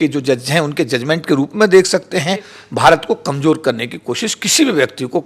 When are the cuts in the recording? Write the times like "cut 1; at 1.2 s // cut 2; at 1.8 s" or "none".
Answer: cut 1; at 2.6 s